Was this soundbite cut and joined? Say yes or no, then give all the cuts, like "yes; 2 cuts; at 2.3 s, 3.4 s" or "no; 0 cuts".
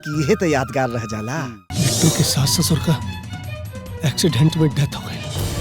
yes; 1 cut; at 1.6 s